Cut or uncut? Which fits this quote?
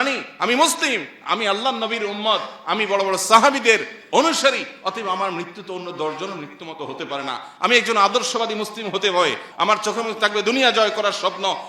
cut